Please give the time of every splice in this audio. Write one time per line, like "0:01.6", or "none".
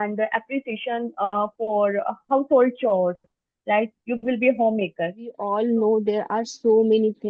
0:05.4

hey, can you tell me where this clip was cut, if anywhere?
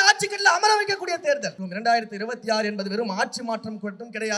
0:01.6

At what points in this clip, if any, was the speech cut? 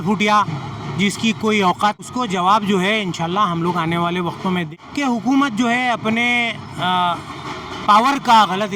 0:02.0
0:04.7

